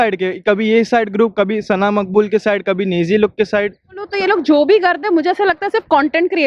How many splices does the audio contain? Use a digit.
1